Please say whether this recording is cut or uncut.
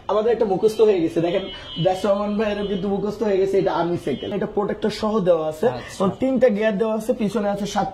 cut